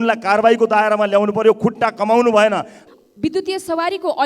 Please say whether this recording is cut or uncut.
cut